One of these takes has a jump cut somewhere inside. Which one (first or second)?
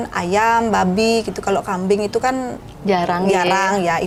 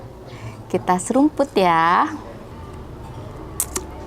second